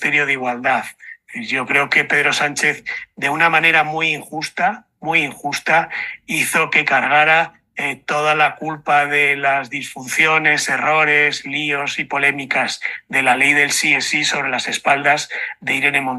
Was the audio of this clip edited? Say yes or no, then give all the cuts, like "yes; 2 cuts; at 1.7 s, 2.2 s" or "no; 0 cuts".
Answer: no; 0 cuts